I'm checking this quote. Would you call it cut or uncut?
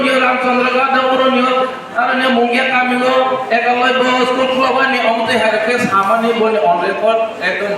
uncut